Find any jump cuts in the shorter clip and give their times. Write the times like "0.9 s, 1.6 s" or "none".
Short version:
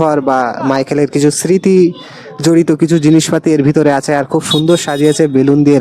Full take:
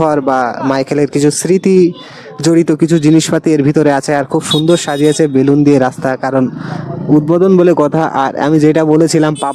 none